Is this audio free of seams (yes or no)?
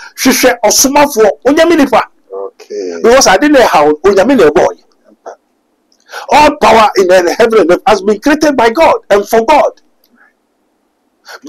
yes